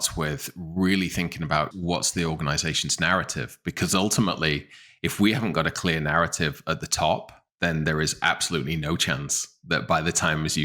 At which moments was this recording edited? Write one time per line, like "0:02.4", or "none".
0:01.7